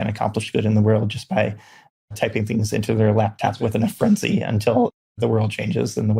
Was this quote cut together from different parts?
no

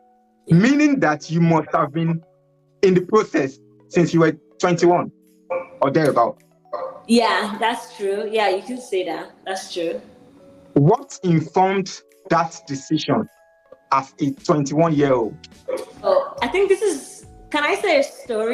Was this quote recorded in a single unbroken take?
no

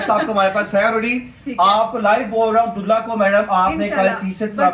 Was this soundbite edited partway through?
no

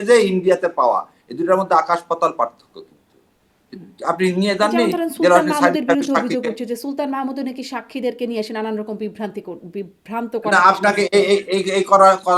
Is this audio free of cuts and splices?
yes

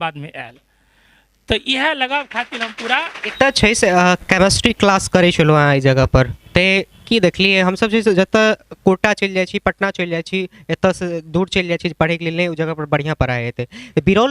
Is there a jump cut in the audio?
yes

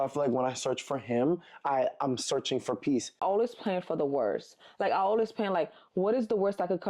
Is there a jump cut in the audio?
yes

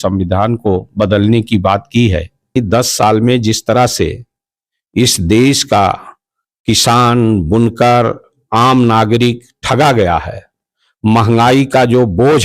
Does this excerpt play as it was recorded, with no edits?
no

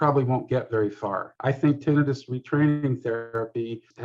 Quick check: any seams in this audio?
yes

